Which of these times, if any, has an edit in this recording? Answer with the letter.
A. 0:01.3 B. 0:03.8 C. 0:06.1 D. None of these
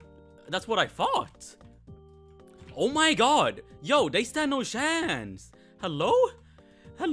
D